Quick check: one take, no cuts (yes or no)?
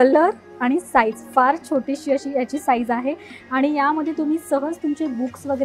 yes